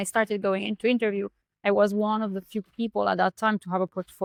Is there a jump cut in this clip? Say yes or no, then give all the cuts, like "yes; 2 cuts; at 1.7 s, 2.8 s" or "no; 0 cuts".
no; 0 cuts